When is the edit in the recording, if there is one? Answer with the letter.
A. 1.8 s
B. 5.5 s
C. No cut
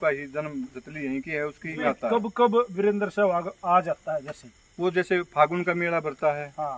A